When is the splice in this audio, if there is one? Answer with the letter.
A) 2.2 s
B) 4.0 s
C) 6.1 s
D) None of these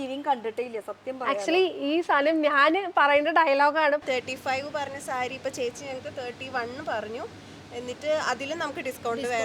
B